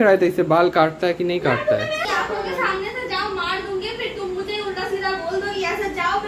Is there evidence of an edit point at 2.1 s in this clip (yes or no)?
yes